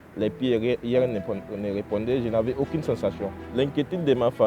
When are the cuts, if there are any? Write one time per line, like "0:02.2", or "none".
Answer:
0:03.4